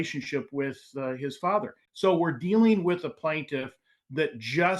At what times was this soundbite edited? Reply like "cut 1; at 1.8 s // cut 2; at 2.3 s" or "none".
cut 1; at 1.8 s